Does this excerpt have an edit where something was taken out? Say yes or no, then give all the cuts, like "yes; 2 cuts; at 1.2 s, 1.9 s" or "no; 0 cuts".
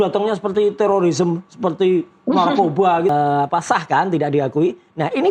yes; 1 cut; at 3.1 s